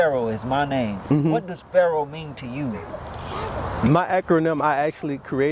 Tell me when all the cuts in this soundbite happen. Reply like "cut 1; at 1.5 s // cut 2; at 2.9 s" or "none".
none